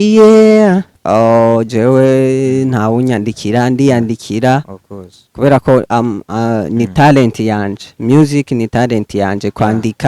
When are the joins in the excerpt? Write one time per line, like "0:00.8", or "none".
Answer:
0:00.9